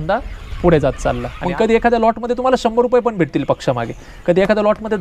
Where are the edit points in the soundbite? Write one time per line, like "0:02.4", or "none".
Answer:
0:01.3